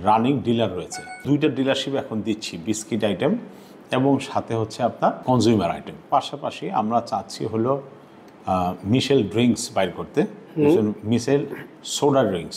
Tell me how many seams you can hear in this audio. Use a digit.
3